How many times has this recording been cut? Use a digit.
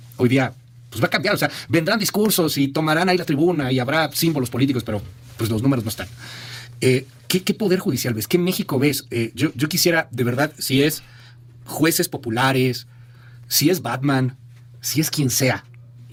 0